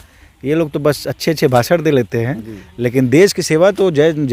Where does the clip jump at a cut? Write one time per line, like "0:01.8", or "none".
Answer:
none